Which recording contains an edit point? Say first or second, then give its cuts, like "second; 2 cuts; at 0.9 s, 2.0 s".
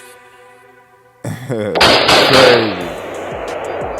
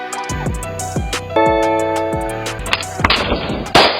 second; 1 cut; at 2.6 s